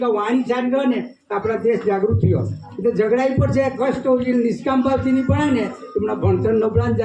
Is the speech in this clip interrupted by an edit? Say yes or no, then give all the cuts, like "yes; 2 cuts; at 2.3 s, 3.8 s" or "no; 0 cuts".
no; 0 cuts